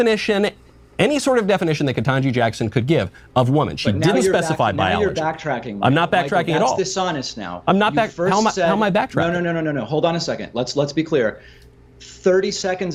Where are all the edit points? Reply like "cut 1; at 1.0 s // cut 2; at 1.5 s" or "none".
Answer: none